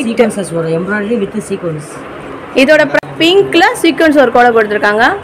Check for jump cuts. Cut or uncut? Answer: cut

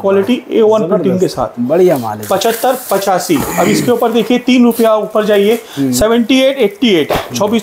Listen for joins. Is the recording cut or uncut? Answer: uncut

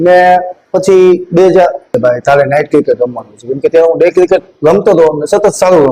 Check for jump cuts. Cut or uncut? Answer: cut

